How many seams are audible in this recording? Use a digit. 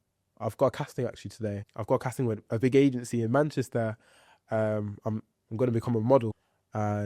1